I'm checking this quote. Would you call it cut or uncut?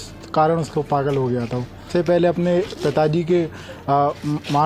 cut